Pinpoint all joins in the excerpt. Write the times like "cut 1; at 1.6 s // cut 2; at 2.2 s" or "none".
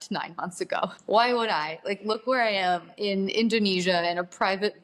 cut 1; at 1.0 s // cut 2; at 2.9 s